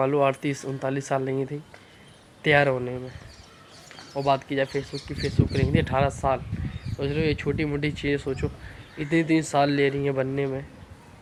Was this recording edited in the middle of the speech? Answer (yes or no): no